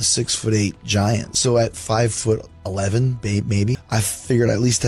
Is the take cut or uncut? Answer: cut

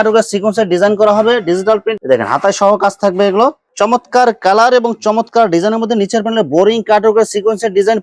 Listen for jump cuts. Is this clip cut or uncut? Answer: cut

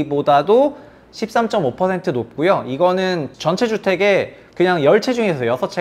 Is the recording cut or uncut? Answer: cut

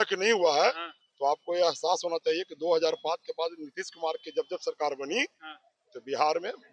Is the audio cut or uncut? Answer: uncut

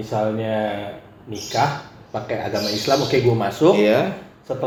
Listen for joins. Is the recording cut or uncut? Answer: uncut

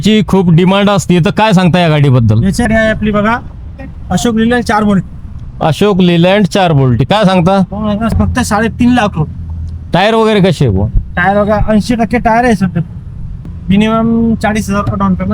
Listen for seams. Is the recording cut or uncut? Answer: cut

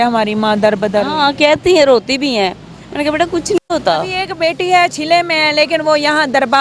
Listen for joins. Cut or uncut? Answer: cut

